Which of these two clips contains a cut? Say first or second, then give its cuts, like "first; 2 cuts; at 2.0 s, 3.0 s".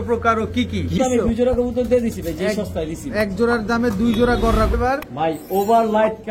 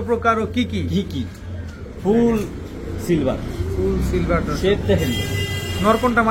first; 2 cuts; at 1.0 s, 4.7 s